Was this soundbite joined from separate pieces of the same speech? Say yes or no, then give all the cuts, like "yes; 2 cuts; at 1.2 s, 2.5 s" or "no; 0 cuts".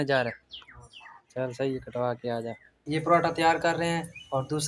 yes; 1 cut; at 2.7 s